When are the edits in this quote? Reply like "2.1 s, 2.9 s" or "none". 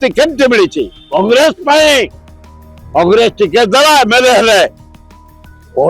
none